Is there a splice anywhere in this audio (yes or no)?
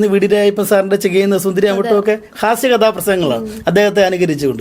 no